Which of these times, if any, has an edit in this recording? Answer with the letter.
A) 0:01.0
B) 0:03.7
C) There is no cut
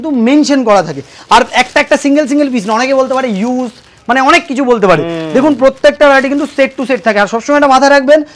C